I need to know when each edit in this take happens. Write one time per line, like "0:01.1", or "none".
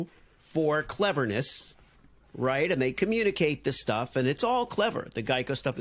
none